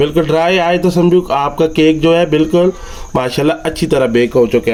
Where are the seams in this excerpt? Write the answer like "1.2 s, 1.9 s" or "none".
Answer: none